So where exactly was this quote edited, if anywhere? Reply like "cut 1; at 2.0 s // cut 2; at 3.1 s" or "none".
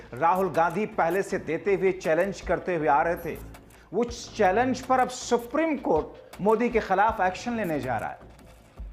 none